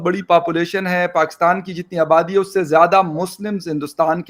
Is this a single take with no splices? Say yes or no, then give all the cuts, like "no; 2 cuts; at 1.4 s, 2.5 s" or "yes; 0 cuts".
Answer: yes; 0 cuts